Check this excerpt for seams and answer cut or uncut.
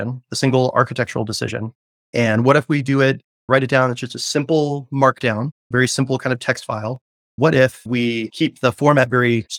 uncut